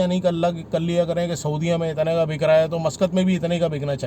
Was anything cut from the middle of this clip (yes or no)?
no